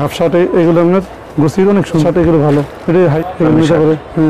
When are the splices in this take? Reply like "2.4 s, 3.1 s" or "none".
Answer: 2.0 s, 3.2 s